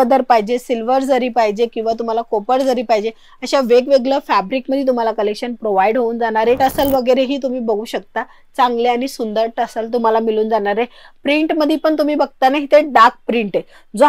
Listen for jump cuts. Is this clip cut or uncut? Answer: cut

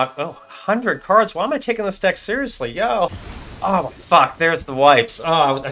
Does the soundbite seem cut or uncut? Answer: cut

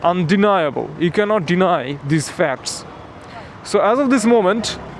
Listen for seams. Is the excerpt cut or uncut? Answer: uncut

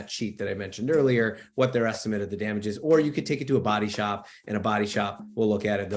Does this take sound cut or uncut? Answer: uncut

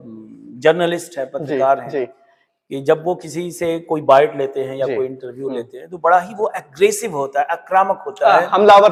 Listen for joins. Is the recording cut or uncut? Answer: uncut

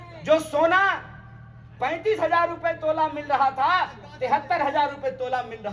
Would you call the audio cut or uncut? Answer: uncut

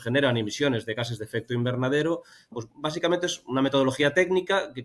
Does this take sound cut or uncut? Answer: cut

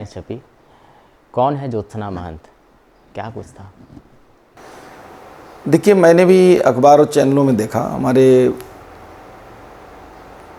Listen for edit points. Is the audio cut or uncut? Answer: uncut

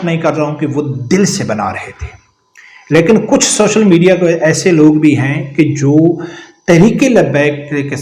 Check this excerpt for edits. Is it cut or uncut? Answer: uncut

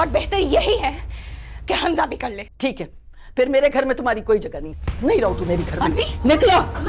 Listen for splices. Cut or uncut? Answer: cut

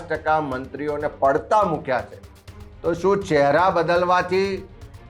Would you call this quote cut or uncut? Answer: uncut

